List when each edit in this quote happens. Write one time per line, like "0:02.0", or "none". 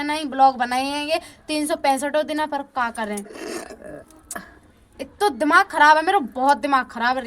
none